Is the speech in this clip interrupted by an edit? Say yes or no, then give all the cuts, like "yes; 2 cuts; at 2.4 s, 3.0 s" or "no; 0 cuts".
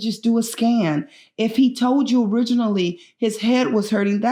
no; 0 cuts